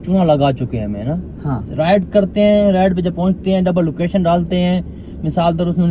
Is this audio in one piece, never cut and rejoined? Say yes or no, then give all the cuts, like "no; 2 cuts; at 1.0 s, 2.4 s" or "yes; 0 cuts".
yes; 0 cuts